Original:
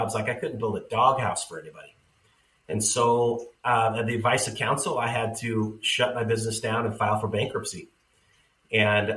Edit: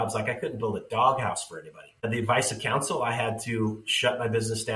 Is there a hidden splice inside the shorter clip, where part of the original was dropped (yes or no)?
yes